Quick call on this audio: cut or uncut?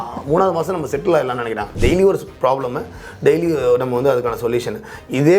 cut